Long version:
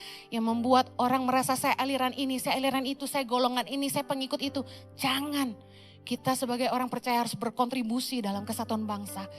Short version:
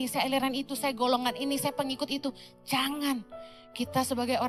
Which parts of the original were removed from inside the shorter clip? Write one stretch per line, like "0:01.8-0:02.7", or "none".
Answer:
none